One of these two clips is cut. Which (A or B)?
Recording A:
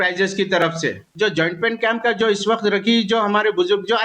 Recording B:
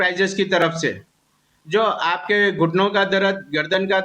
A